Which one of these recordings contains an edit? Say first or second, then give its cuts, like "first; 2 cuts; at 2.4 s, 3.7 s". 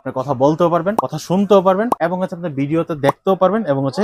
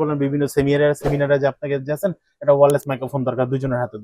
first; 2 cuts; at 1.1 s, 1.9 s